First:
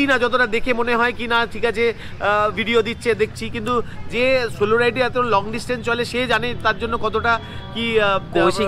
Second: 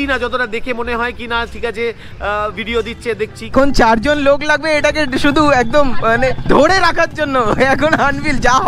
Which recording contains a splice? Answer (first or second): second